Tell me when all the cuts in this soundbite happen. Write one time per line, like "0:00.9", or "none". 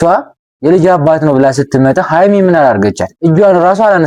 none